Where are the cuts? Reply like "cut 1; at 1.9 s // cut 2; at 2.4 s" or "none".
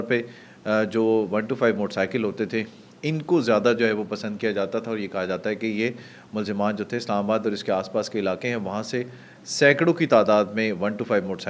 none